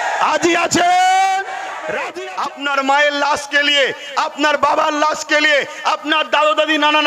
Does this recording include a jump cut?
yes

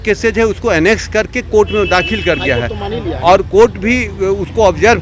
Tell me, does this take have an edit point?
no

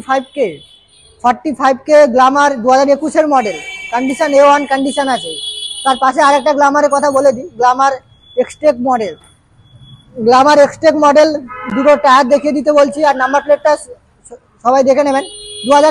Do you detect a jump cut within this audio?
no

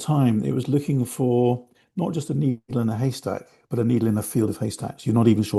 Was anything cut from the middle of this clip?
no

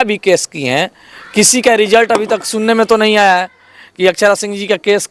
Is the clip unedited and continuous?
yes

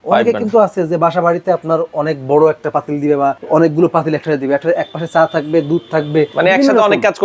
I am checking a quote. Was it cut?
yes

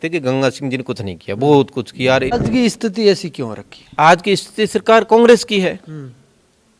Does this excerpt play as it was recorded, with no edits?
no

